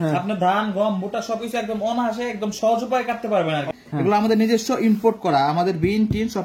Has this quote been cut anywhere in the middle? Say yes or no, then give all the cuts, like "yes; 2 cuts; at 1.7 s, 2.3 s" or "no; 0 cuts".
yes; 1 cut; at 3.7 s